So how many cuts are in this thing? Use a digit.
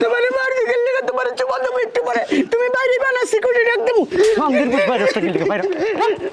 0